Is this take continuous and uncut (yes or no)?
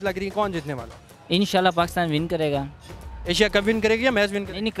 yes